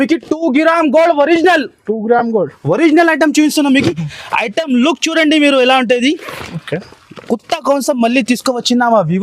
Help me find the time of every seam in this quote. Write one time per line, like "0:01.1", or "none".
none